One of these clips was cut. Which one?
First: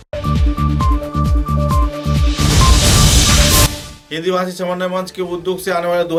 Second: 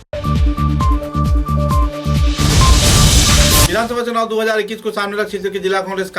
second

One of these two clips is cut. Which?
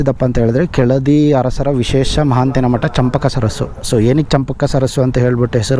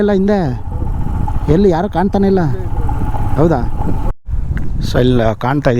second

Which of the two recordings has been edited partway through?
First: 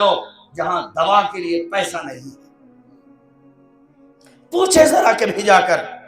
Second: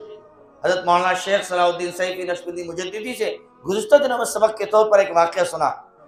first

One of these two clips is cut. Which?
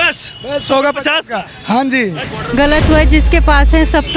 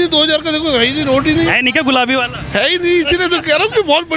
first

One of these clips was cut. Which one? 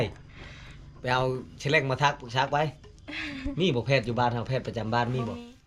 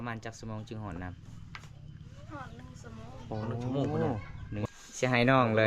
second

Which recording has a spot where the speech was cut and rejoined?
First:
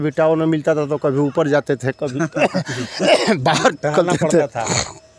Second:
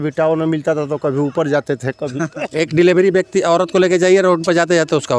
second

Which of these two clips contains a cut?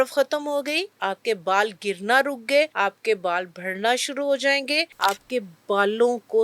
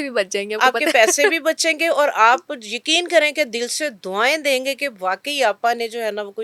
first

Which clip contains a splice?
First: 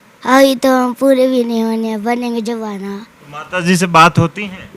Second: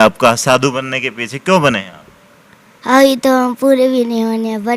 first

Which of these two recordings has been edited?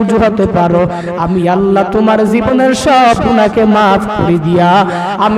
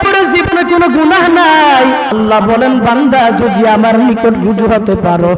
second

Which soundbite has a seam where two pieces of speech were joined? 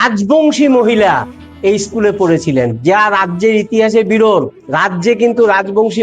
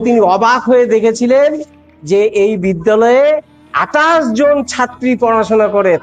first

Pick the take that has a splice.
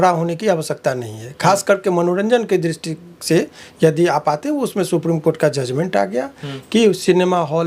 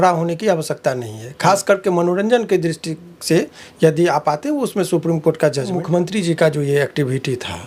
second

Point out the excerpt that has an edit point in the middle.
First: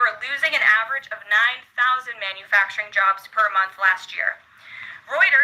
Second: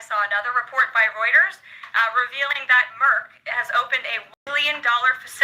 second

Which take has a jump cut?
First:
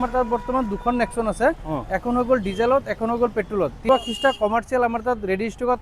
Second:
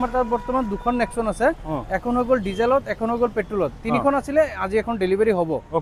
first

